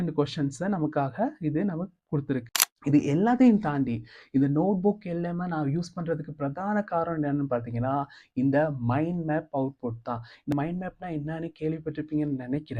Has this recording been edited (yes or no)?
yes